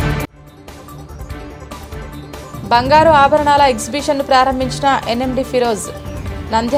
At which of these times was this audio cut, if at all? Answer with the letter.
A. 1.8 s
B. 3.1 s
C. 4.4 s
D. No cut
D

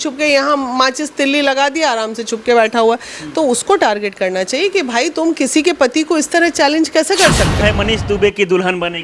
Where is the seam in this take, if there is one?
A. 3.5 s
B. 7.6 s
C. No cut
B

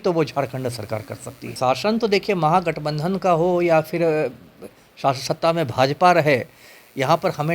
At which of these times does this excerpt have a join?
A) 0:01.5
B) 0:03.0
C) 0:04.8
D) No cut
A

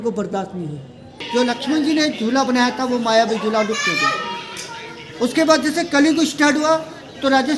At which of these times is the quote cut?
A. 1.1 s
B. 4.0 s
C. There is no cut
A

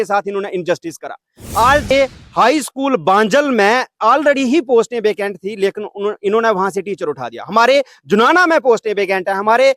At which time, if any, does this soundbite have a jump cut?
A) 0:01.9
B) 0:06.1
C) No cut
A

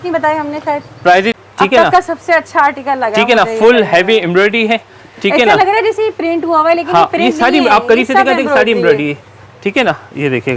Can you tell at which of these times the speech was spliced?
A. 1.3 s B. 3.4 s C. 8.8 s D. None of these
A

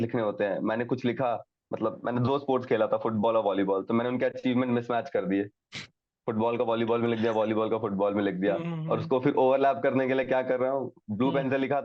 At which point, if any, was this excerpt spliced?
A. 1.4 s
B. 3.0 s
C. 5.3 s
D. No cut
D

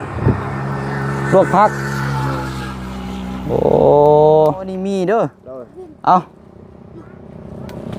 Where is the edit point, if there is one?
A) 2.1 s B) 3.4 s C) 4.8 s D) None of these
C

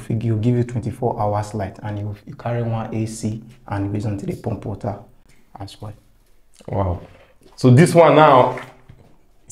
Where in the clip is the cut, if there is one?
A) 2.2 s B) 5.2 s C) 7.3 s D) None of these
D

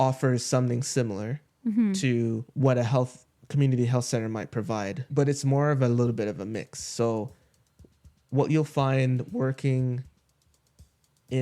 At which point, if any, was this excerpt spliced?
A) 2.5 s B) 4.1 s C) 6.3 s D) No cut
A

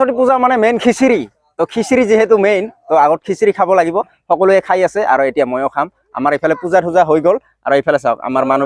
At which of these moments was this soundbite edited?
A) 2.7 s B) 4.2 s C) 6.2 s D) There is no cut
D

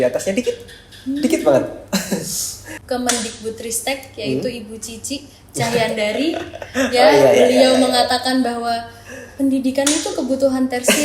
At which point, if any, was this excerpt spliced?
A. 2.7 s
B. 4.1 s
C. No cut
A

